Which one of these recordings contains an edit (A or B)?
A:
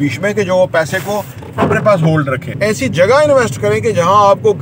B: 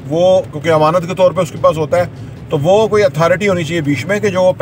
A